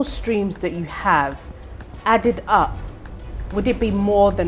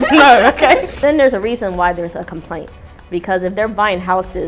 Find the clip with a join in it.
second; 1 cut; at 0.9 s

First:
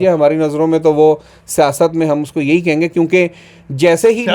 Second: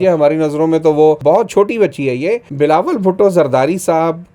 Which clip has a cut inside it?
second; 2 cuts; at 1.2 s, 2.5 s

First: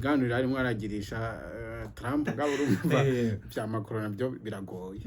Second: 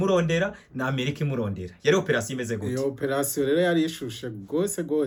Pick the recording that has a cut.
first; 1 cut; at 2.3 s

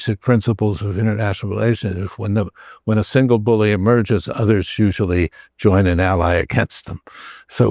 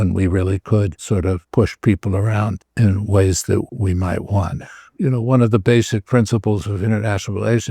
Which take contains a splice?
second; 4 cuts; at 1.4 s, 2.6 s, 3.7 s, 4.9 s

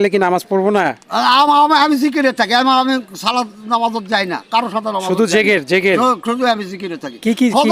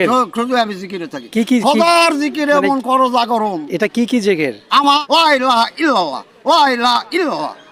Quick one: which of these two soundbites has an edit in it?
second; 1 cut; at 5.0 s

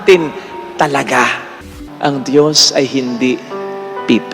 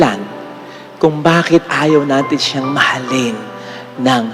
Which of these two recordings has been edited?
first; 1 cut; at 1.6 s

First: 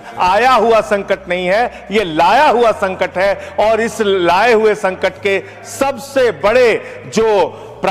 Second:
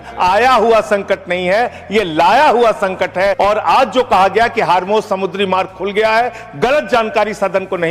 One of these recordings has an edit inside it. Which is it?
second; 1 cut; at 3.3 s

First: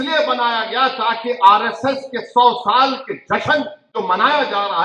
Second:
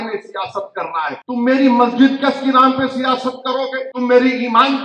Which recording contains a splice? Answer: second; 2 cuts; at 1.2 s, 3.9 s

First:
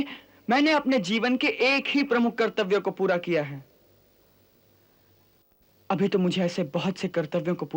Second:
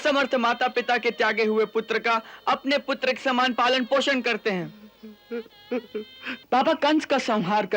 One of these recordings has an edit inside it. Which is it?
second; 1 cut; at 6.4 s

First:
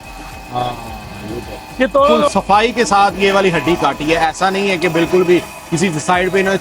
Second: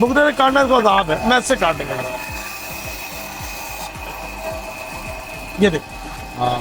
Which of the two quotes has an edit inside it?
first; 1 cut; at 2.3 s

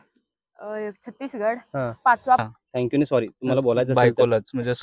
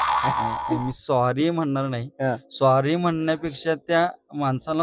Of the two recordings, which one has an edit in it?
first; 1 cut; at 2.4 s

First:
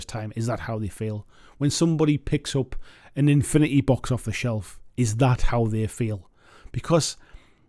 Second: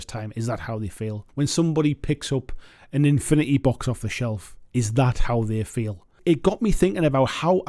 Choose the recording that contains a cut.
second; 2 cuts; at 1.2 s, 6.2 s

